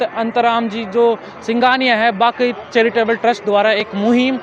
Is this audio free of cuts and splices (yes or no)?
yes